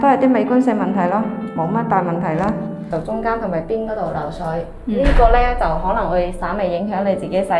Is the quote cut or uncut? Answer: cut